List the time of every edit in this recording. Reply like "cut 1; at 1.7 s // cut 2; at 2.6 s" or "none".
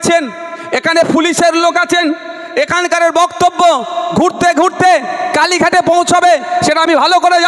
none